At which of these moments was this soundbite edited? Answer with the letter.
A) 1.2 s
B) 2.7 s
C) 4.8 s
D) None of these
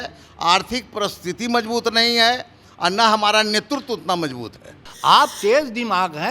C